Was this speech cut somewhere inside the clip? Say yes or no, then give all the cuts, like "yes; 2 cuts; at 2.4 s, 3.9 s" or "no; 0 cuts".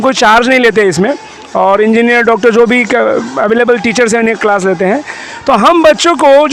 no; 0 cuts